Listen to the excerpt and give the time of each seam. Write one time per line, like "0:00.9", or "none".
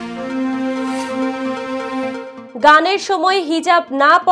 0:02.4